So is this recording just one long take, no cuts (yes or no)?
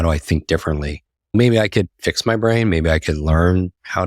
no